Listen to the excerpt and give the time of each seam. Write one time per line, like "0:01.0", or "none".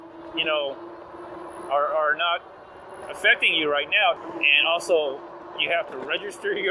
0:04.2